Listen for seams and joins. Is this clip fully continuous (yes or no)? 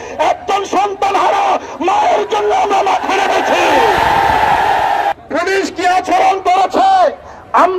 no